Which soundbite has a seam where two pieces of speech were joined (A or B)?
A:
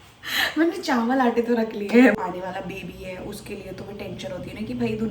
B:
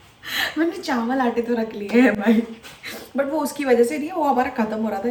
A